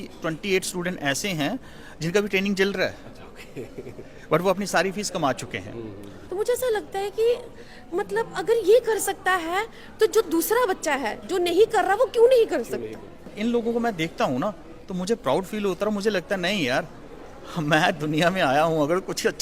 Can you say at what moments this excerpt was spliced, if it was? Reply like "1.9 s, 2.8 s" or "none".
6.2 s, 13.2 s